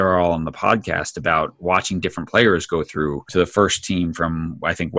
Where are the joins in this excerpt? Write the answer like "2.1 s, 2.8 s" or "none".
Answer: 3.2 s